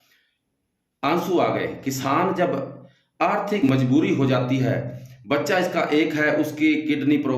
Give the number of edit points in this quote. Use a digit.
1